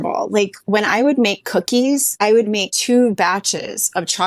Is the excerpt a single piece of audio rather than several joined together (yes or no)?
no